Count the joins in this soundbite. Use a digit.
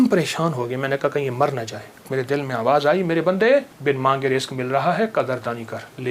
2